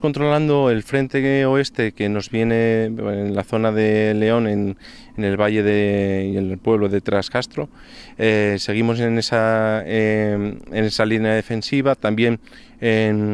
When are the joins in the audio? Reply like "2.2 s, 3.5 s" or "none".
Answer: none